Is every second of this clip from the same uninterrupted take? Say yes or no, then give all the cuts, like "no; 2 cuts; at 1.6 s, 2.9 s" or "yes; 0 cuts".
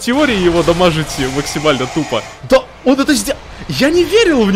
no; 1 cut; at 2.3 s